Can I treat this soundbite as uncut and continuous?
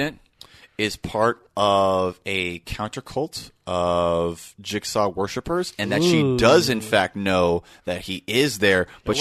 yes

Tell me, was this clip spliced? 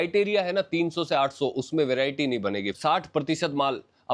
yes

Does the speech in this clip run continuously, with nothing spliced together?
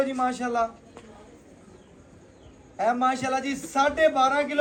yes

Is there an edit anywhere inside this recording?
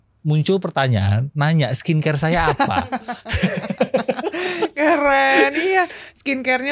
no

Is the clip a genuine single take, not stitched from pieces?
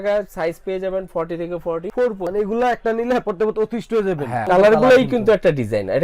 no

